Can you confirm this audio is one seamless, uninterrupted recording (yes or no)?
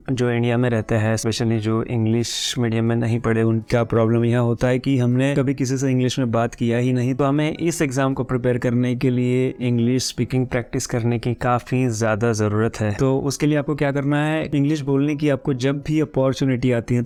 yes